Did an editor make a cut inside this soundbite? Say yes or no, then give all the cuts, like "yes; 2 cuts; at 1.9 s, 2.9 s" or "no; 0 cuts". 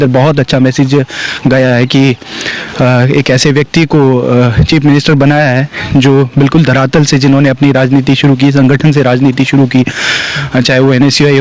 no; 0 cuts